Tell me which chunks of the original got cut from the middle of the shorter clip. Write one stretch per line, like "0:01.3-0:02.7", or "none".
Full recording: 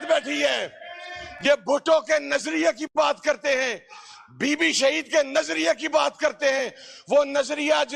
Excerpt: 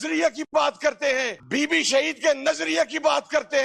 0:03.8-0:04.3

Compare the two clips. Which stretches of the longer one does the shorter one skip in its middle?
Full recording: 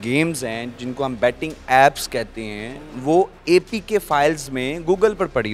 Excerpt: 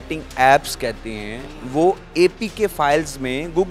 none

